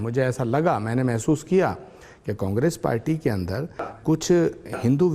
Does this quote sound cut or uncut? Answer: uncut